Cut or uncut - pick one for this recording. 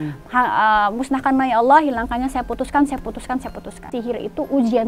cut